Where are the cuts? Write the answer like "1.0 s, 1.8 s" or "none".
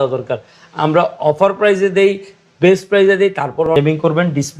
3.7 s